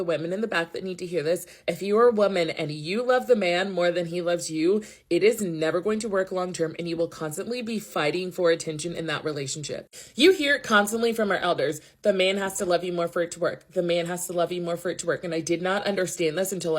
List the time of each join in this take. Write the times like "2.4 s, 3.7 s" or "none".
11.6 s